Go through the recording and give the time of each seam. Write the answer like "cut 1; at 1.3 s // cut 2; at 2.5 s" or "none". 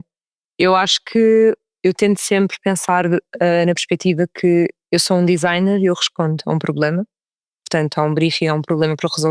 none